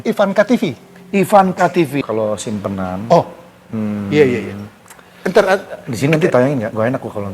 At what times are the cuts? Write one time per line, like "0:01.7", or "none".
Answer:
0:02.0